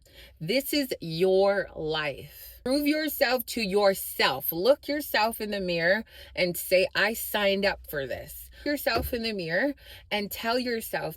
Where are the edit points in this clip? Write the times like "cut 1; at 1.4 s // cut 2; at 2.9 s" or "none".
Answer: cut 1; at 2.5 s